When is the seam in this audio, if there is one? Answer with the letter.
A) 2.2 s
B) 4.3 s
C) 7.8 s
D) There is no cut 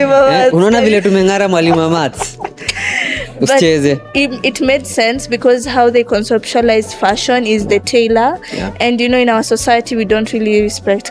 D